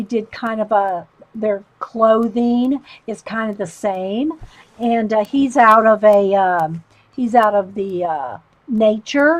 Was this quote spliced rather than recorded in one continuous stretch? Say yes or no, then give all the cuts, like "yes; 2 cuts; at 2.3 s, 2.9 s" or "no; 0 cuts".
yes; 1 cut; at 2.2 s